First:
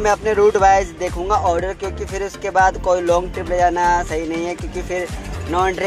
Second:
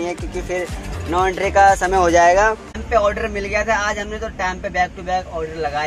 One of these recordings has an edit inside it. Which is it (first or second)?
second